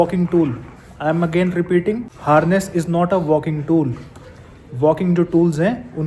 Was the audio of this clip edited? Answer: yes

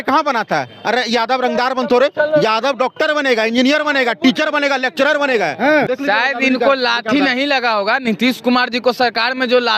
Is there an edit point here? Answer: yes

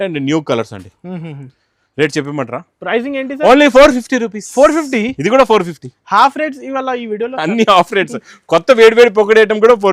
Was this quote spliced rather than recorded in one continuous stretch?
no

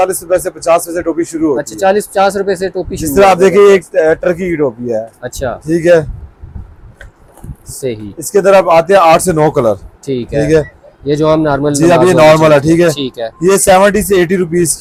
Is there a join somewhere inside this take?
no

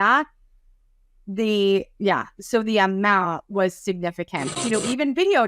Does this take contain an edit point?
yes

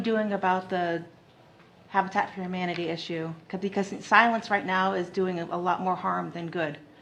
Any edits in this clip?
no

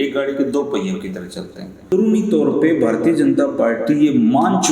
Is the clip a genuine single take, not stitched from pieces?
no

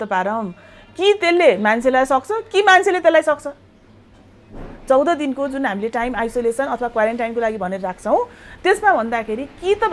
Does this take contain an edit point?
no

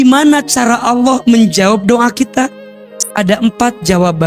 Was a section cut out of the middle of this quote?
no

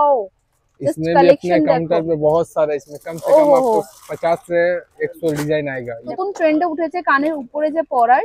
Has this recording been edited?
yes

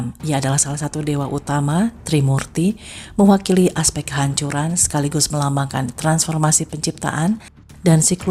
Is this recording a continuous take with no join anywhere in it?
yes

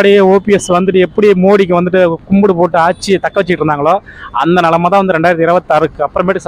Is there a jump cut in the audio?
no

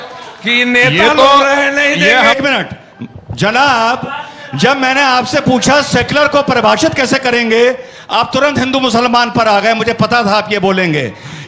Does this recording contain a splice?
yes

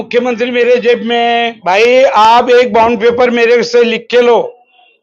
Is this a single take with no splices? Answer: no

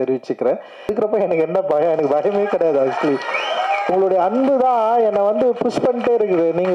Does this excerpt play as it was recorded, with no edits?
no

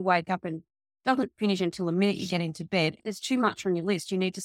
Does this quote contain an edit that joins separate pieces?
yes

